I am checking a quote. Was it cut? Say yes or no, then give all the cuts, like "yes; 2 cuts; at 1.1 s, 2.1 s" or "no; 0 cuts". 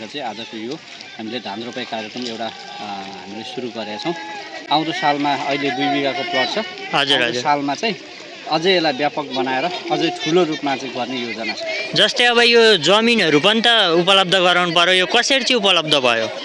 no; 0 cuts